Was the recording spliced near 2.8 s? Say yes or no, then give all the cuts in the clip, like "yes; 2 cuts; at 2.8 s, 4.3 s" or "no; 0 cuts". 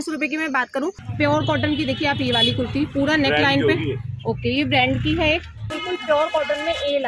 no; 2 cuts; at 1.0 s, 5.7 s